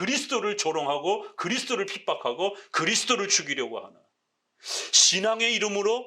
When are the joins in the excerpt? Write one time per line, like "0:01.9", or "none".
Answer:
none